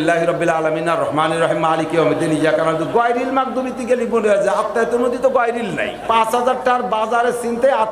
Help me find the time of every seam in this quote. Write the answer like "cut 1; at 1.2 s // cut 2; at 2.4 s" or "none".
cut 1; at 6.0 s